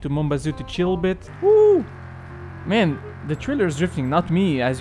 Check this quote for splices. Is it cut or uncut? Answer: cut